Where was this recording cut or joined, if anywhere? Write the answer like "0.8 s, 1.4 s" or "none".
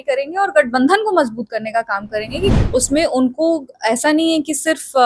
2.5 s